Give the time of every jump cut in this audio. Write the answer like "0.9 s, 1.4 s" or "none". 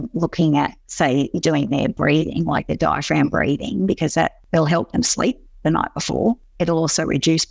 4.4 s, 6.5 s